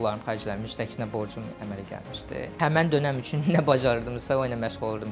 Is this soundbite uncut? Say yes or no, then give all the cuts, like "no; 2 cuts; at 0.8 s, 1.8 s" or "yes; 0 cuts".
yes; 0 cuts